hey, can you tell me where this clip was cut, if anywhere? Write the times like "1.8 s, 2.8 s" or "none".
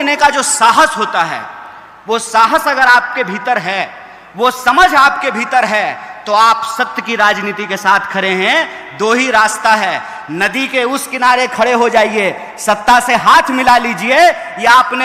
none

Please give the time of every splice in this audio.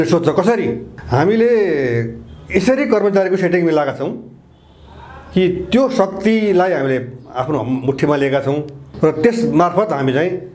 0.9 s, 8.9 s

